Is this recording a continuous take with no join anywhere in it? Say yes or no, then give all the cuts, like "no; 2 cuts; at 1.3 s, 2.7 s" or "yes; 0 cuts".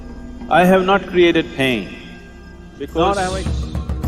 no; 1 cut; at 3.1 s